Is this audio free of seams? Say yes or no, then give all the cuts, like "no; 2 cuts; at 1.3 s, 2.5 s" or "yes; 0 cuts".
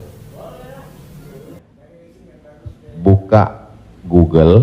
no; 1 cut; at 1.4 s